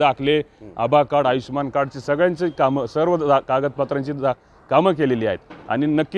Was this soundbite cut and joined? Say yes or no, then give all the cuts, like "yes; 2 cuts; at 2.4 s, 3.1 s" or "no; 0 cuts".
no; 0 cuts